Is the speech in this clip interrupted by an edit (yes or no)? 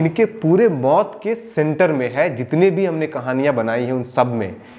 no